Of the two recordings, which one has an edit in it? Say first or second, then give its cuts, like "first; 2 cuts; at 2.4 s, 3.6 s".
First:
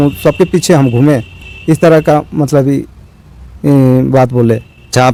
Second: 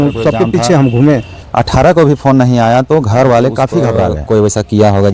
second; 2 cuts; at 1.4 s, 4.2 s